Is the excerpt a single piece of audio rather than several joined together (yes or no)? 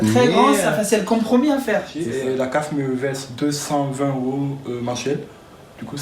no